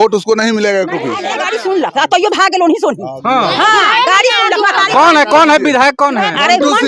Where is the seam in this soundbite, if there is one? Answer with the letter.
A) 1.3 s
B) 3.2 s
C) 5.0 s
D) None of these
A